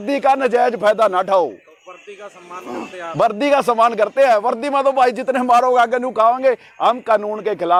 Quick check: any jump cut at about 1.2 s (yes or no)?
no